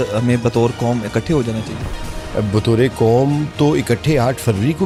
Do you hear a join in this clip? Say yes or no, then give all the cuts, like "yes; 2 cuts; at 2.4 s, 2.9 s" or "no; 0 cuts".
no; 0 cuts